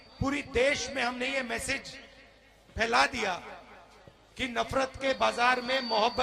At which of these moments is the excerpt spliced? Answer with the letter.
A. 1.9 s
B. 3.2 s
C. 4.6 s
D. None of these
D